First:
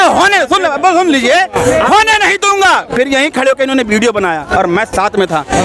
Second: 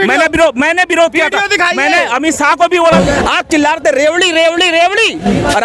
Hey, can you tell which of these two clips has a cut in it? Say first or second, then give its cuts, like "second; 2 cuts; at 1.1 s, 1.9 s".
second; 1 cut; at 2.8 s